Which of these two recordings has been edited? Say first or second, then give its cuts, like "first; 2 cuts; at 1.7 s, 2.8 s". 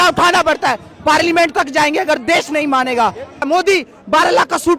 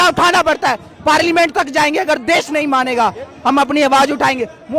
first; 1 cut; at 3.4 s